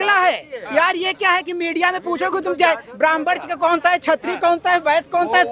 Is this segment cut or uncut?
uncut